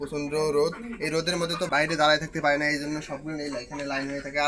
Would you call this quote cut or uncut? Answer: cut